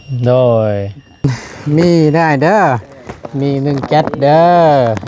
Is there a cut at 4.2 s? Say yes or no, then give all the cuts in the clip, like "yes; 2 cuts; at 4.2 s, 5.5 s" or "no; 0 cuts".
no; 1 cut; at 1.5 s